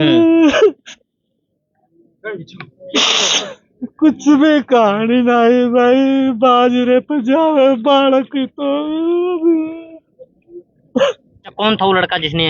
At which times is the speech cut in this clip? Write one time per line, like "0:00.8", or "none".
0:11.5